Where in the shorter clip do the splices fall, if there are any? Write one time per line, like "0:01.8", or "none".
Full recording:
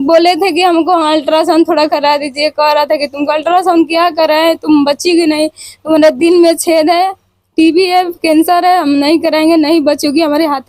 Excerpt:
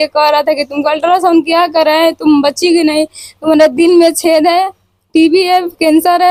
none